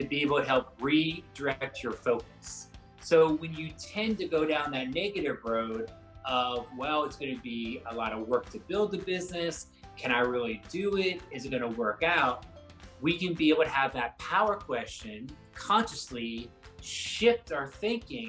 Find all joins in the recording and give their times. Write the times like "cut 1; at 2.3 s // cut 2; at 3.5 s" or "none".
cut 1; at 15.5 s